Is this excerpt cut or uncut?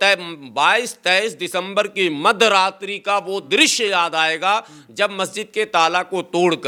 uncut